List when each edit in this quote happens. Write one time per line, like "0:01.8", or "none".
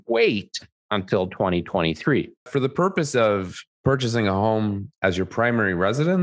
0:02.4

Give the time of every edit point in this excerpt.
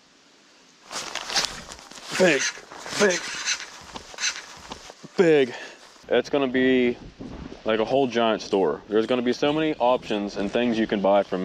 0:06.0

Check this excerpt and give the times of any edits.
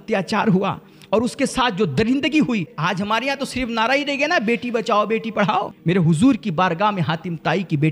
0:02.7
0:05.7

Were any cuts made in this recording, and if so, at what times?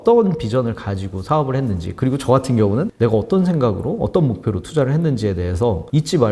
0:02.9

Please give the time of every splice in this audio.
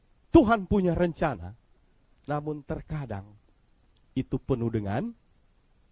none

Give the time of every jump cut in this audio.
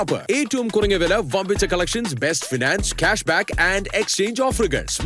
none

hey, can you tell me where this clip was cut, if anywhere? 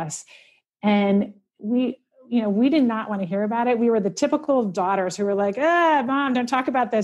none

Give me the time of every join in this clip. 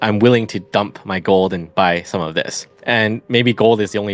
none

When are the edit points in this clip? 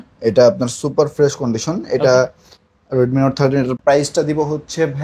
0:03.7

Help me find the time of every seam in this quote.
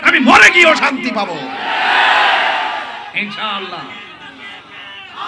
none

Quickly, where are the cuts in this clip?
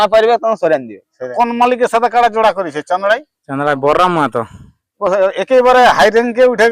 0:01.3

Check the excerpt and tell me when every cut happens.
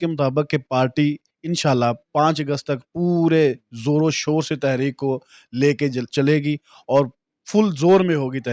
none

